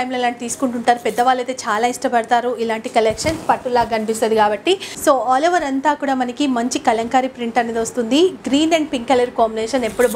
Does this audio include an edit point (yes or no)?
yes